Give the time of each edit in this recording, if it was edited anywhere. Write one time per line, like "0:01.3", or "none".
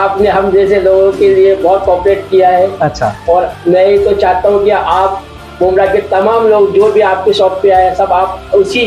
none